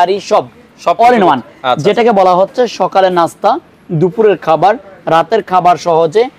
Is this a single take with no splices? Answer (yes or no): yes